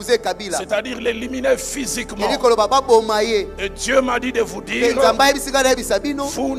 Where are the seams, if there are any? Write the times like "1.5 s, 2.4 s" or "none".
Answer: none